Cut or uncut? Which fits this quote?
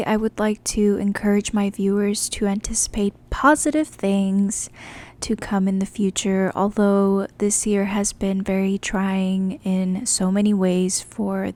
uncut